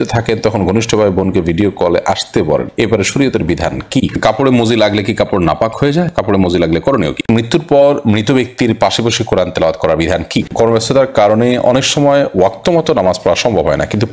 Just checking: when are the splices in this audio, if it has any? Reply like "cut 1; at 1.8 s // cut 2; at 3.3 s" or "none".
cut 1; at 4.2 s // cut 2; at 7.2 s // cut 3; at 10.5 s